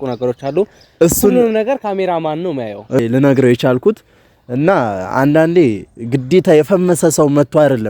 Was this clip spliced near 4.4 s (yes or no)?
no